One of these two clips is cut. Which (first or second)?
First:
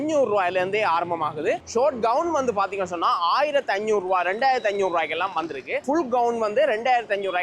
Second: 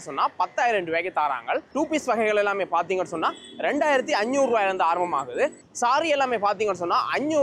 first